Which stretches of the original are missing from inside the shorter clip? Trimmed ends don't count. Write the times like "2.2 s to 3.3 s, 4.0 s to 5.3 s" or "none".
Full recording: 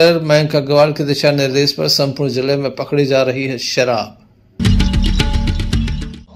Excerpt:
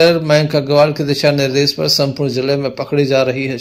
none